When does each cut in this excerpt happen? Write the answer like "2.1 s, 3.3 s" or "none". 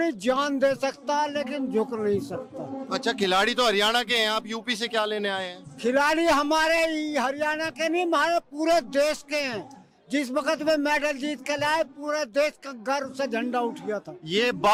none